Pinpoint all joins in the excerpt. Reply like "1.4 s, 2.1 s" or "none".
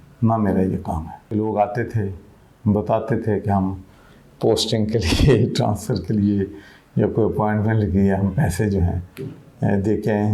1.1 s